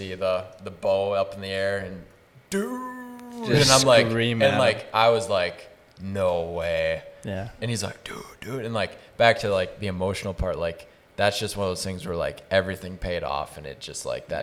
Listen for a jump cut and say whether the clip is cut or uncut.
uncut